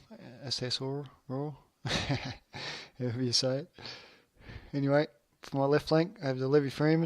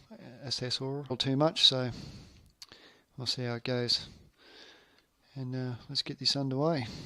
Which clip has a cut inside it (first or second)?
first